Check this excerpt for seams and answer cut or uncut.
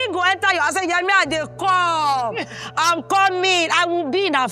uncut